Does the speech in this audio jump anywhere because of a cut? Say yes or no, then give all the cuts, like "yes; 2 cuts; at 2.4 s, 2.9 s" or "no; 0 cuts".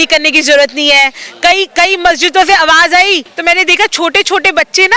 yes; 1 cut; at 3.3 s